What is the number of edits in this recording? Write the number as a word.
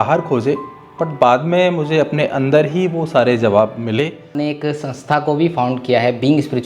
one